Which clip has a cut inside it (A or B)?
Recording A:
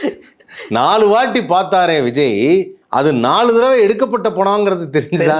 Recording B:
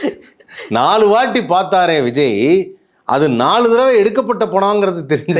A